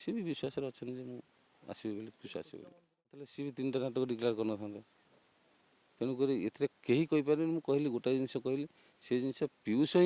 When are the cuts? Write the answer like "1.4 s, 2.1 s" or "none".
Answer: 3.3 s